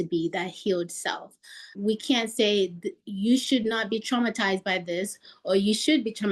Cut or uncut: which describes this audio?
cut